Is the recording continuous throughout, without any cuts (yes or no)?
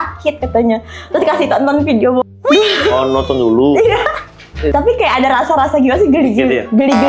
no